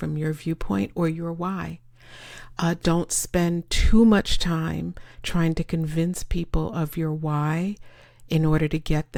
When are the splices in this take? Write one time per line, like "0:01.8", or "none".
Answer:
none